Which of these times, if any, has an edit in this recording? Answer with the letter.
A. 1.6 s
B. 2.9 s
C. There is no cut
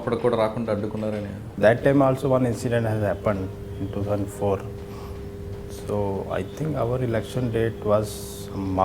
A